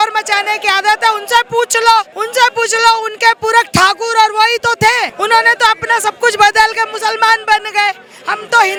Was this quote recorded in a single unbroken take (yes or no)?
yes